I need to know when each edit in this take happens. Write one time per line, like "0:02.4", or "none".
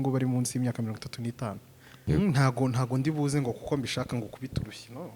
0:02.0